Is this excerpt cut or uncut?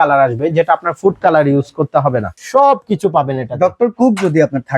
cut